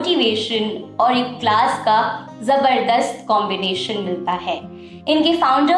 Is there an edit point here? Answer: no; 0 cuts

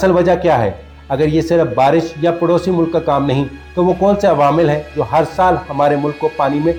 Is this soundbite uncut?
yes; 0 cuts

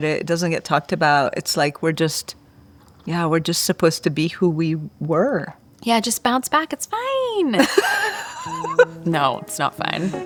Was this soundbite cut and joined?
no; 0 cuts

